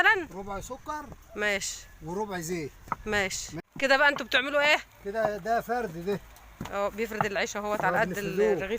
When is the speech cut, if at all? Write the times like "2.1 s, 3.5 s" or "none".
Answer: 3.6 s